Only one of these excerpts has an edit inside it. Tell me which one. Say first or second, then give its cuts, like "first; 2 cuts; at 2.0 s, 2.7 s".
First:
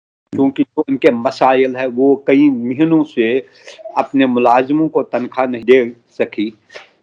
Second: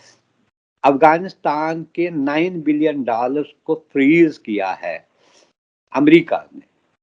first; 1 cut; at 5.6 s